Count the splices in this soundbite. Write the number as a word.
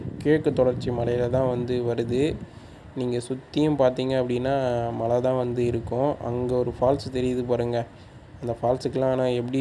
zero